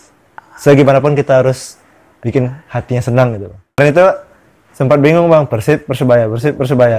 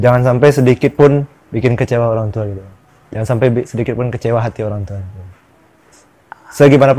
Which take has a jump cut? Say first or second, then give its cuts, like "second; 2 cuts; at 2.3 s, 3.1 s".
first; 1 cut; at 3.8 s